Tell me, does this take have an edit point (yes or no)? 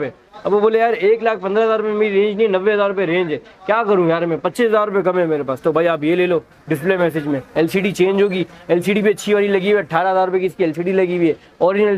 no